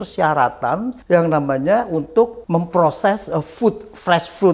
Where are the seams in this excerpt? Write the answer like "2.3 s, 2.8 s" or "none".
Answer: 0.9 s, 2.4 s